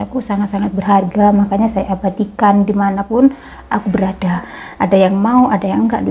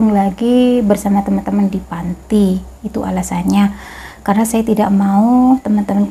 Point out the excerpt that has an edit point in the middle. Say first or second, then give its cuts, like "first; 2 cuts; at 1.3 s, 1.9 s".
first; 1 cut; at 4.6 s